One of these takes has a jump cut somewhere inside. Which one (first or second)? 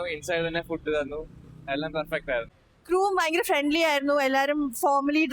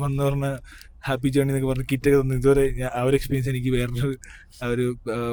first